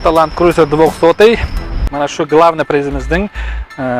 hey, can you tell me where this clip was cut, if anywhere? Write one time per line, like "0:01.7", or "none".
0:01.9